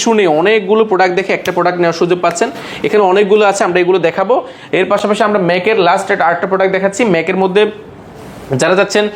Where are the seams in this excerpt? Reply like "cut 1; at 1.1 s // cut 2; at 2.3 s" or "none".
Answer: none

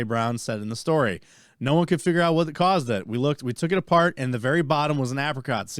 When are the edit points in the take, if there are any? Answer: none

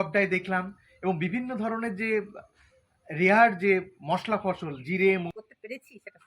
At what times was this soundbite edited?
cut 1; at 5.3 s

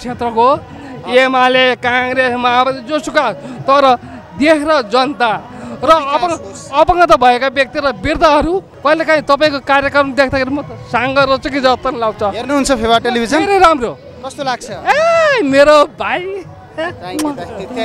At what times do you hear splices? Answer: cut 1; at 8.7 s

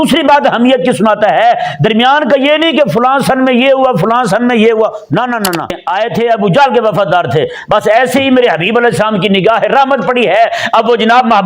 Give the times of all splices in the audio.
cut 1; at 5.8 s

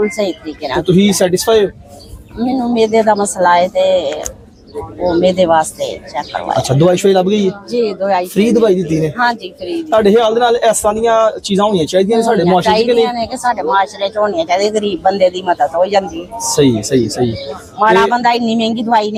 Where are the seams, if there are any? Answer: none

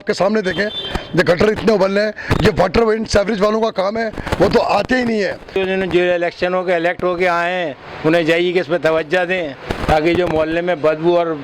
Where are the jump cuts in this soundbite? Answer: cut 1; at 5.5 s

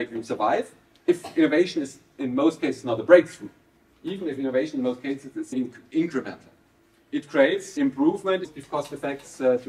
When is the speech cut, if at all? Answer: cut 1; at 1.0 s // cut 2; at 5.5 s // cut 3; at 7.7 s // cut 4; at 8.5 s

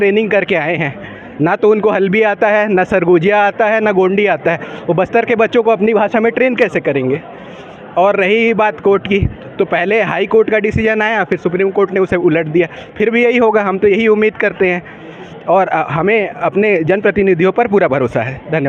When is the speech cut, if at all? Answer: none

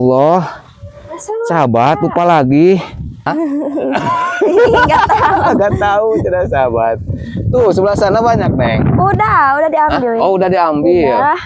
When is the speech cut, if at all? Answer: cut 1; at 3.3 s

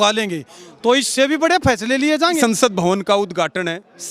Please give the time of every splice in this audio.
cut 1; at 2.3 s

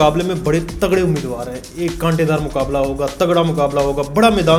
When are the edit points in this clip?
none

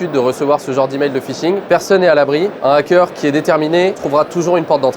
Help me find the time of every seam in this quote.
cut 1; at 4.0 s

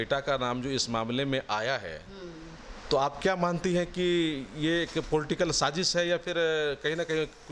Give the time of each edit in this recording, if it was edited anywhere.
none

